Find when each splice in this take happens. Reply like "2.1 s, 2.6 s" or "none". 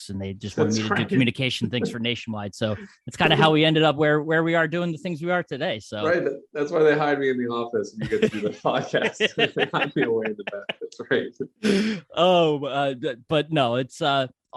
none